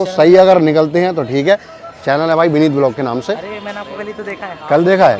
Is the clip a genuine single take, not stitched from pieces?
yes; 0 cuts

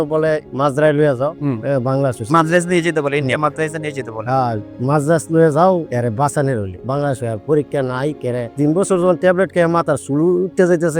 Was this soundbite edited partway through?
no; 0 cuts

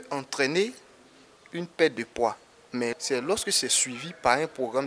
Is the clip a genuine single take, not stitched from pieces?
no; 1 cut; at 3.0 s

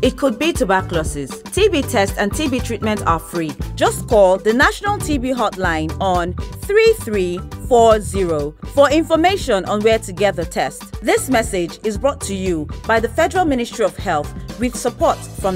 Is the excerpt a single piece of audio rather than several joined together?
yes; 0 cuts

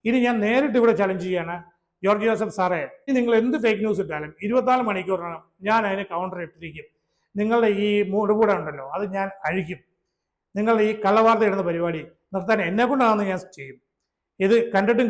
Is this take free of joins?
no; 1 cut; at 3.1 s

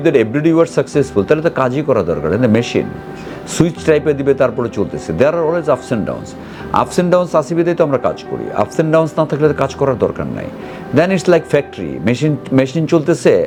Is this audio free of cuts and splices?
yes; 0 cuts

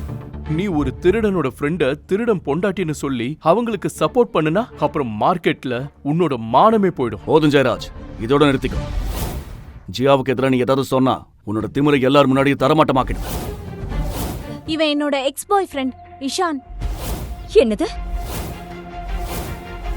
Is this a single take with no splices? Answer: no; 1 cut; at 14.6 s

